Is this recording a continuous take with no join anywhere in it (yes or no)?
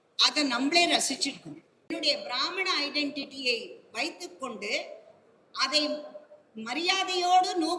no